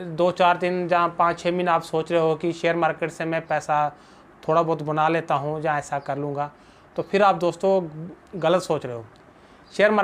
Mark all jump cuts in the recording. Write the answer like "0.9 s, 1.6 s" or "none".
none